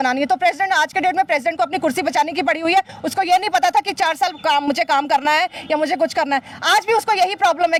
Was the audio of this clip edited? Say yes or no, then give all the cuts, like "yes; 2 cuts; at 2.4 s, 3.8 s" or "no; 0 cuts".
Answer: no; 0 cuts